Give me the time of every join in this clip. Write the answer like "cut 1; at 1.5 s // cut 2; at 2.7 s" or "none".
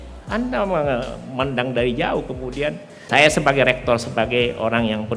cut 1; at 3.1 s

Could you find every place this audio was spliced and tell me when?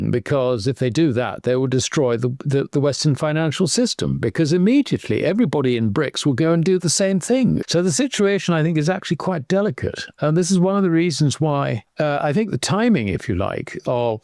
cut 1; at 7.6 s // cut 2; at 11.8 s

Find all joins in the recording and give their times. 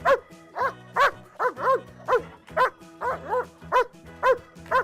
cut 1; at 3.9 s

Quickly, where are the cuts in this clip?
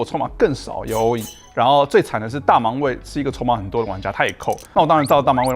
cut 1; at 4.6 s

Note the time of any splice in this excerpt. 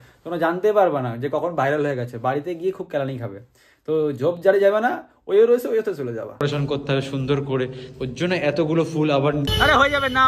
cut 1; at 6.4 s // cut 2; at 9.5 s

